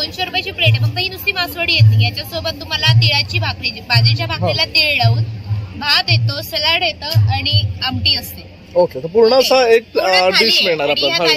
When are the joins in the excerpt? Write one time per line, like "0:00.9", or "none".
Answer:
none